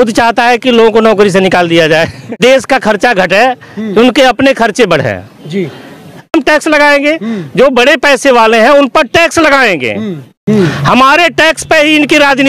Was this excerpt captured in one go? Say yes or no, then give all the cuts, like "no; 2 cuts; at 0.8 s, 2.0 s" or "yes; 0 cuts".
no; 3 cuts; at 2.4 s, 6.3 s, 10.4 s